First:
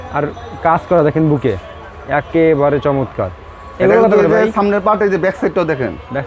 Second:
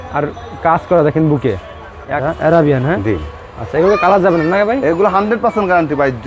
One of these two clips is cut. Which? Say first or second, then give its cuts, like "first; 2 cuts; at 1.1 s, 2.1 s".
second; 1 cut; at 2.2 s